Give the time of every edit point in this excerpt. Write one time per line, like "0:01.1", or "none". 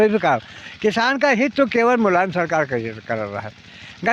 none